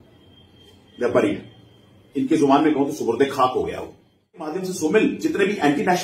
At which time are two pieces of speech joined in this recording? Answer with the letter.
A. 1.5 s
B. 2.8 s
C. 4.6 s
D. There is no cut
C